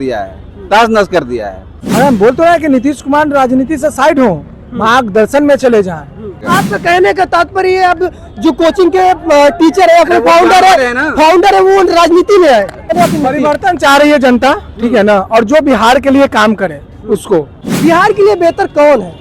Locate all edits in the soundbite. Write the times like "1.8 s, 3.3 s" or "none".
1.7 s, 6.3 s, 12.9 s, 17.6 s